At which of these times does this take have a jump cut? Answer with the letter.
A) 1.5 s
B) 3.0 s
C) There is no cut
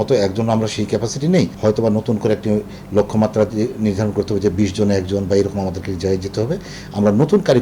A